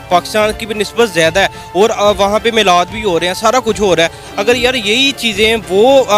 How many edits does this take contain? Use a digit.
0